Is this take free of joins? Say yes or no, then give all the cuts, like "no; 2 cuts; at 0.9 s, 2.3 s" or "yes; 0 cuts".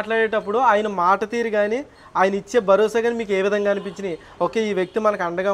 yes; 0 cuts